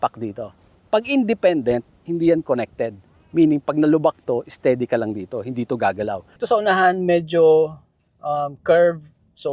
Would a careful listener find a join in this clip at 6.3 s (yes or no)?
yes